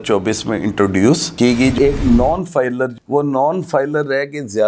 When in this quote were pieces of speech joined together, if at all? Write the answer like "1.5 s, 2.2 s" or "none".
1.7 s